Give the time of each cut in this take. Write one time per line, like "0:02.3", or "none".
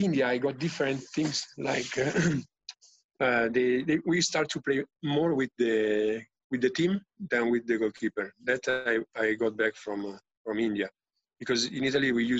none